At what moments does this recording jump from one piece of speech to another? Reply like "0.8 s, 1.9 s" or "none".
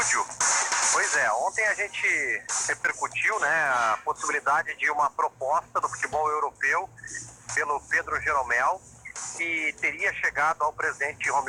none